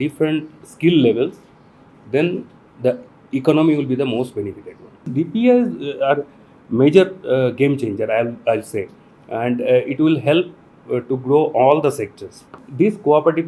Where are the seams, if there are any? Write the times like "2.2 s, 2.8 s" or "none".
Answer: 5.1 s, 12.6 s